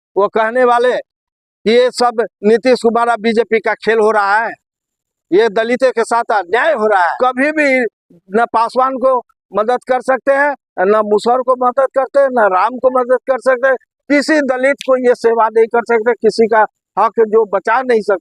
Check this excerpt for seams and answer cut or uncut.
cut